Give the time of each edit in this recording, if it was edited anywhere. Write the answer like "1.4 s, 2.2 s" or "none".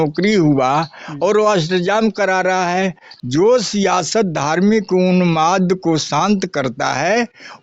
3.0 s